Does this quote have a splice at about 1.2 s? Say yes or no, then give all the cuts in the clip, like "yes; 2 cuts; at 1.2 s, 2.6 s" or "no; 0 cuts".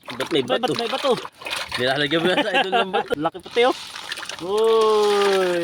no; 1 cut; at 3.1 s